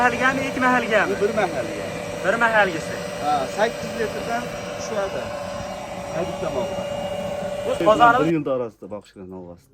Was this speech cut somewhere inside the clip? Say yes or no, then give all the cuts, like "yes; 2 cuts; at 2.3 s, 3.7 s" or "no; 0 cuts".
yes; 1 cut; at 8.2 s